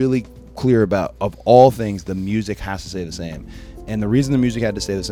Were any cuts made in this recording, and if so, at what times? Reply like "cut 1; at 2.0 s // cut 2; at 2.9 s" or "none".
none